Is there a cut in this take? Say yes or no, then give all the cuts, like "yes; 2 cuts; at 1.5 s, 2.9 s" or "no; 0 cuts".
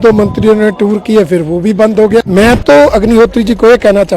yes; 1 cut; at 2.3 s